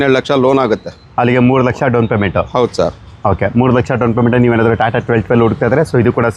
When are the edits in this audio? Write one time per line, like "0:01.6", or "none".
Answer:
none